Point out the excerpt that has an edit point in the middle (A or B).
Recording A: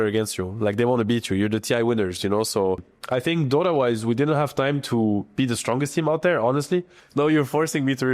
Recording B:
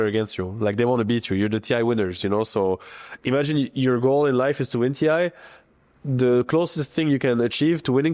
A